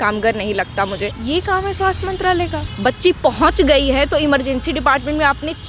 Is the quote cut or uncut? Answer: cut